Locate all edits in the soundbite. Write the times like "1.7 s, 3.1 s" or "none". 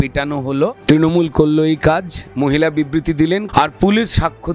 0.8 s, 3.5 s

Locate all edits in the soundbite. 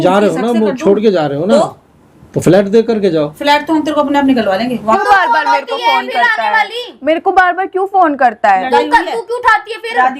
4.8 s

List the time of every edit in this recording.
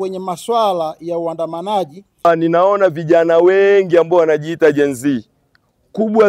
2.2 s

